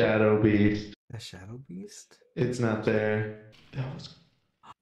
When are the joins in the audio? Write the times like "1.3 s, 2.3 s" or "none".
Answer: 0.9 s, 3.6 s